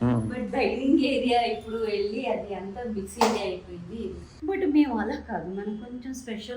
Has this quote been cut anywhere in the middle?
yes; 1 cut; at 4.3 s

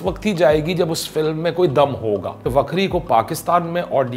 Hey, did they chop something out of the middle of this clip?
yes; 1 cut; at 2.5 s

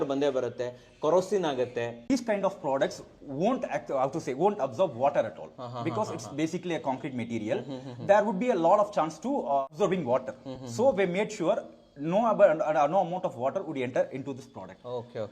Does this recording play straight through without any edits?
no; 1 cut; at 2.0 s

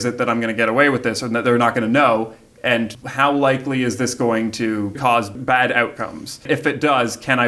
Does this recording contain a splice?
yes; 3 cuts; at 3.0 s, 4.9 s, 6.5 s

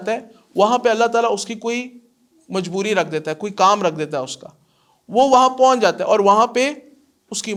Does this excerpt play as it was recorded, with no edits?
yes; 0 cuts

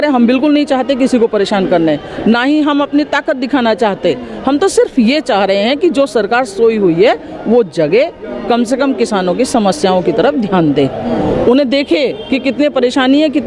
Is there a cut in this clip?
no; 0 cuts

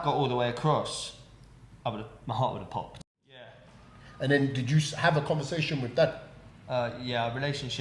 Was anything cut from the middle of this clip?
yes; 1 cut; at 3.0 s

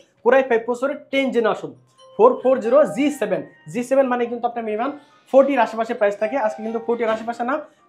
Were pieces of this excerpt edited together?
no; 0 cuts

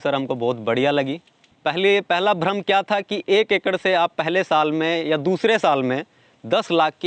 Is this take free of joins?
no; 1 cut; at 1.4 s

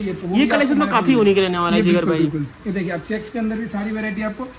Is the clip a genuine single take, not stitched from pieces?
yes; 0 cuts

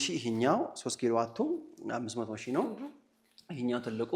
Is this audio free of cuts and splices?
yes; 0 cuts

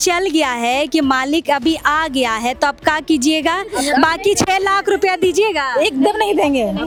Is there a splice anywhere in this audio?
no; 0 cuts

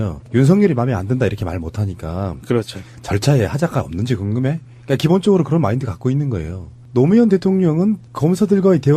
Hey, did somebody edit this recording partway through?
yes; 1 cut; at 5.1 s

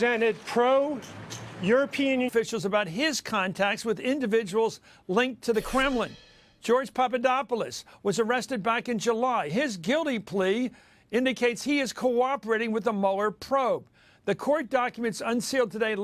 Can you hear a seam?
no; 0 cuts

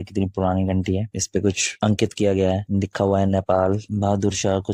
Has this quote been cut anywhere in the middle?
no; 0 cuts

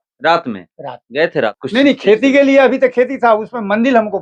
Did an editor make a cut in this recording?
yes; 1 cut; at 1.6 s

